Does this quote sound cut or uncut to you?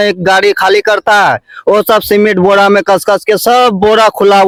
uncut